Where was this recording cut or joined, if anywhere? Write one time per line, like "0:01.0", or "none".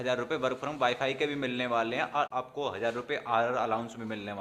0:02.3